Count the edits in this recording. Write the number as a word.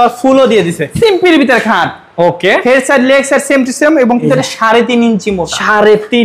two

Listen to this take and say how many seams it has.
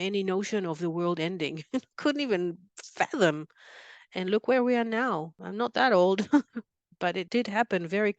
two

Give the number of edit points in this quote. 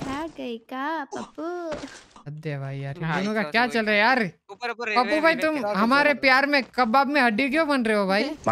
one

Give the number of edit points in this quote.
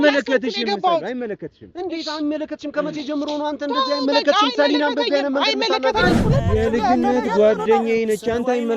one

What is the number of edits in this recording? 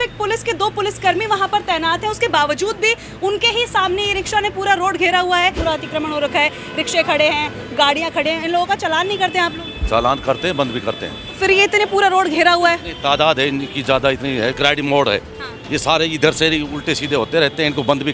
two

